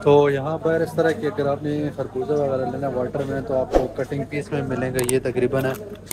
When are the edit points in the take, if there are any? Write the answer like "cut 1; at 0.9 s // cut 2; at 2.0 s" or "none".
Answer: none

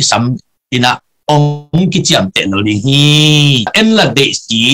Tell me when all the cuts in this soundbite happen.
cut 1; at 3.7 s

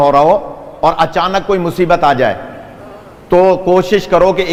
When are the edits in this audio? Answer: none

